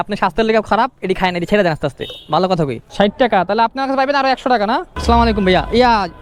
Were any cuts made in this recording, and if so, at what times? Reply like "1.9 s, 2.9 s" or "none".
2.8 s, 4.9 s